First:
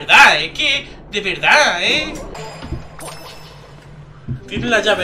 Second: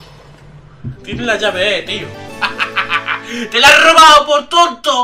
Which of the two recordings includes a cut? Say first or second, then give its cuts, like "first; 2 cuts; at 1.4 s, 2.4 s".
first; 1 cut; at 2.3 s